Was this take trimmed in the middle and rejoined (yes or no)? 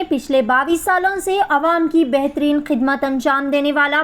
no